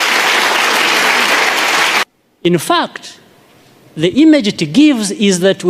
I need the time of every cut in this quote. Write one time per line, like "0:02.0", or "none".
0:02.0